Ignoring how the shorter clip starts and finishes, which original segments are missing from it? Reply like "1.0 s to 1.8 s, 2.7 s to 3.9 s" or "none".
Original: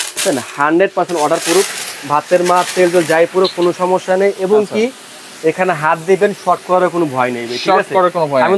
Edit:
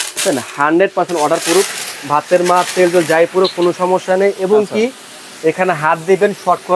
none